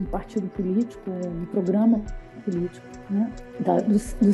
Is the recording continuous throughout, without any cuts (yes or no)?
no